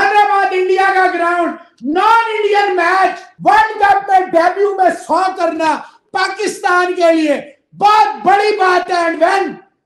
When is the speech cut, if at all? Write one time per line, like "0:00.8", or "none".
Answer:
0:03.3

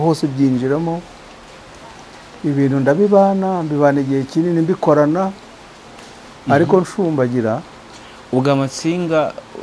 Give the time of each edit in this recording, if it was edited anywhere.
none

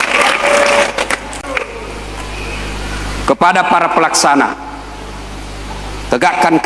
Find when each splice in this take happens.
0:01.4

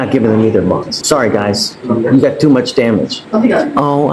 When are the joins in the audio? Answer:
0:01.0
0:03.2

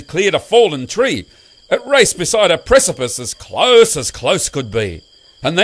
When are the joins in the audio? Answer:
none

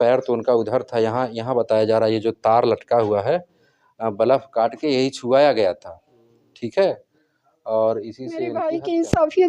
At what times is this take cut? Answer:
0:08.5

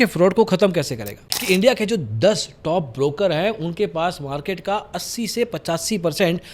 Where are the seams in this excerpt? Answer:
0:01.3

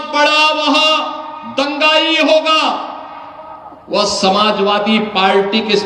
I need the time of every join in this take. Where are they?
none

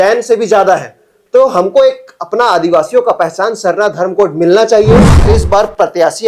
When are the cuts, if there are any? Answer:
0:05.3

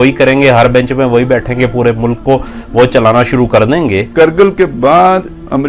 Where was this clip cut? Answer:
0:04.1

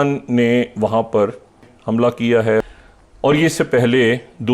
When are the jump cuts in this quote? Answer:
0:01.7
0:02.6

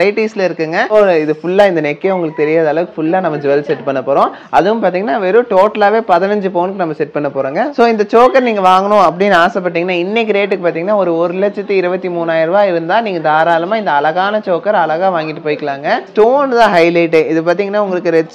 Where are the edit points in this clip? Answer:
0:00.9
0:07.7
0:16.1

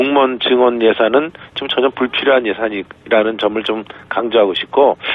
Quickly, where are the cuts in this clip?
none

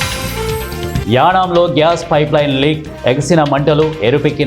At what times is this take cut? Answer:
0:01.0

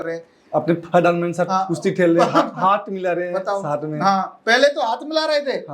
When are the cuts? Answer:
none

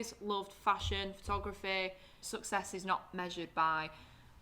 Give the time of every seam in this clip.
0:02.2

